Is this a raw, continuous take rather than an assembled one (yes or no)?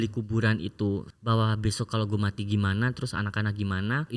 no